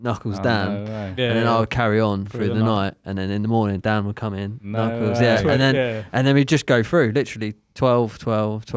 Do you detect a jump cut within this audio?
no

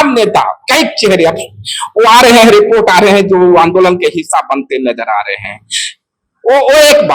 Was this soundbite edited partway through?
no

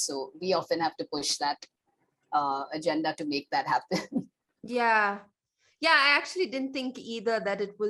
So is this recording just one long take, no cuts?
yes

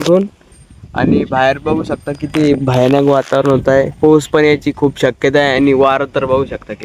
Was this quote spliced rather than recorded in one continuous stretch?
no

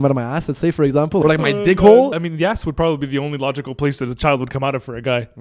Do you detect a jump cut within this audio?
yes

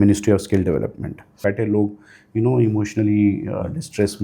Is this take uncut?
no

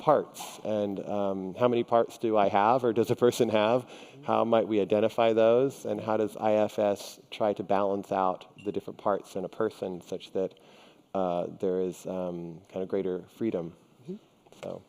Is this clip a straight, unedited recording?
no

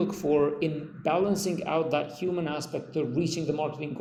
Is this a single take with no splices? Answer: yes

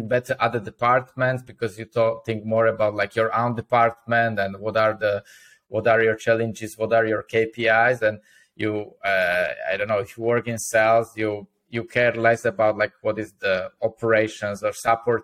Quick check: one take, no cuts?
yes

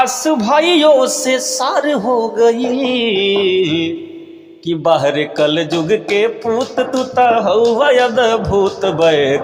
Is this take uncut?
yes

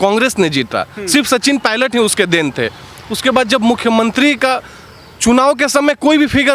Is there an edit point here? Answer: no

